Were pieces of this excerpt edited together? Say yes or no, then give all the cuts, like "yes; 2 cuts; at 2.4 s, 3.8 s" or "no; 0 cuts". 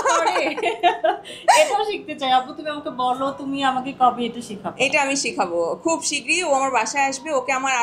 no; 0 cuts